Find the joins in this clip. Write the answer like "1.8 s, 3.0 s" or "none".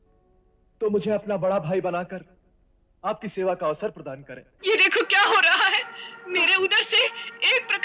4.5 s